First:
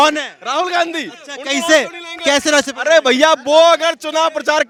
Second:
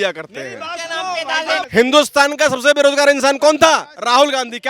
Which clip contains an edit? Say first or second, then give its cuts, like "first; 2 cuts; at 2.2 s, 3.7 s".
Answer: second; 1 cut; at 1.6 s